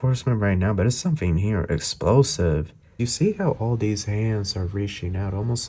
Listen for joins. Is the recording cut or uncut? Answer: cut